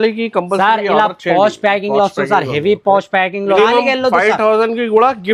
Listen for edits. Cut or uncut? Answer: cut